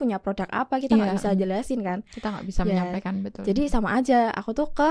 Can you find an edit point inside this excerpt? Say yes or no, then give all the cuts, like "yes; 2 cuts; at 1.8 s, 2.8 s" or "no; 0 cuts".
no; 0 cuts